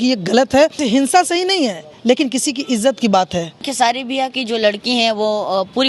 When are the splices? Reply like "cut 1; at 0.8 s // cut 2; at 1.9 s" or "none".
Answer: cut 1; at 0.8 s // cut 2; at 3.7 s